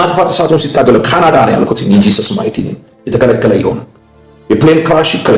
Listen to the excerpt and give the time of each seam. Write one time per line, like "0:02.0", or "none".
none